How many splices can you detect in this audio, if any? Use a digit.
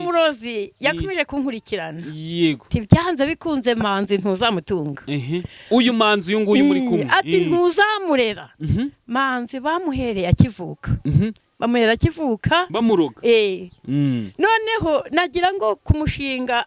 0